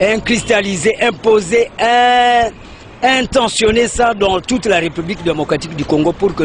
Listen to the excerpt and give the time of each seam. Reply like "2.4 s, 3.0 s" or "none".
none